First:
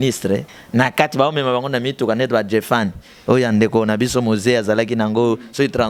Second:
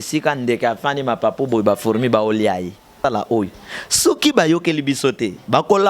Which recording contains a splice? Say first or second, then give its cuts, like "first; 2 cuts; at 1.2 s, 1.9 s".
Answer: second; 1 cut; at 2.9 s